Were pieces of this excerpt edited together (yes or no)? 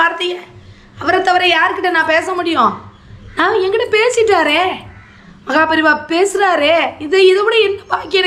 no